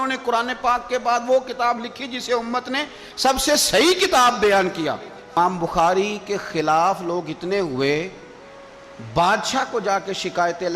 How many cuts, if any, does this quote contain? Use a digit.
1